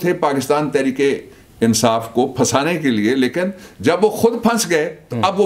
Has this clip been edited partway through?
no; 0 cuts

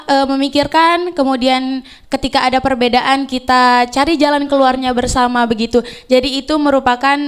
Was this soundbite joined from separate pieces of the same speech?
no; 0 cuts

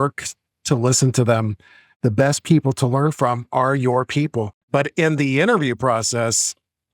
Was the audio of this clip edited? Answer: yes; 2 cuts; at 1.8 s, 4.6 s

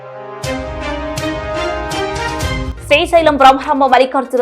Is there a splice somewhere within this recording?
yes; 1 cut; at 1.5 s

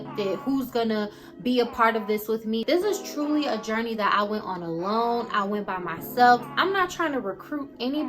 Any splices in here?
yes; 2 cuts; at 2.6 s, 6.5 s

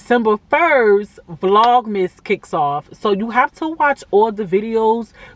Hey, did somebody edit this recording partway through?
no; 0 cuts

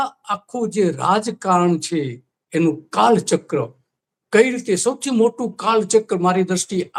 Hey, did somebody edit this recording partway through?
no; 0 cuts

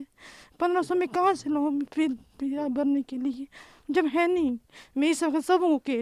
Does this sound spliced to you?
no; 0 cuts

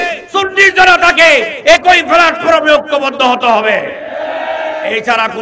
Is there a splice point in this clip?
no; 0 cuts

